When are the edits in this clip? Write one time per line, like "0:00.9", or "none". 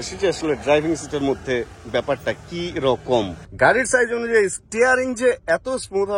0:03.4